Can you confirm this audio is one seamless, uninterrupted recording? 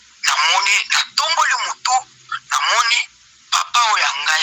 yes; 0 cuts

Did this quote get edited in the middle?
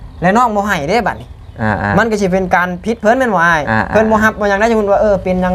no; 0 cuts

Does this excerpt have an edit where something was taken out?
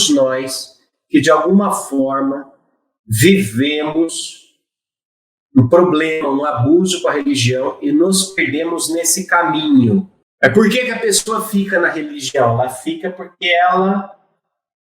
yes; 1 cut; at 10.2 s

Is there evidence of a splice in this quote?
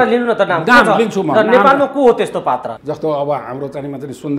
yes; 1 cut; at 2.7 s

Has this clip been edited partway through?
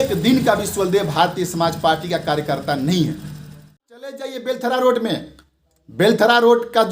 yes; 1 cut; at 4.3 s

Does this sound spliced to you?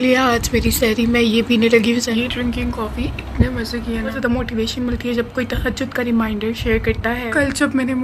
yes; 3 cuts; at 2.1 s, 4.2 s, 7.2 s

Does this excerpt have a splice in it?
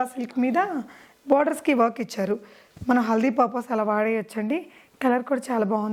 no; 0 cuts

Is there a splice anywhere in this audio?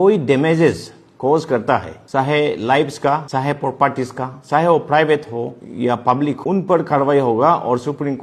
yes; 4 cuts; at 2.0 s, 3.3 s, 5.6 s, 6.4 s

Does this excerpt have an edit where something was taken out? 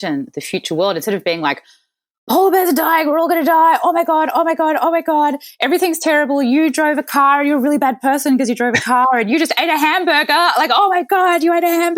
no; 0 cuts

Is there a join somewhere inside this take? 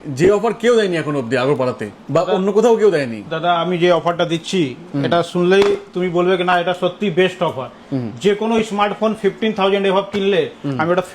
no; 0 cuts

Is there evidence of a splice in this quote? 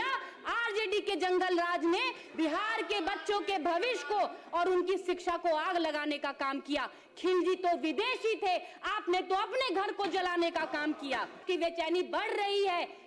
yes; 1 cut; at 11.4 s

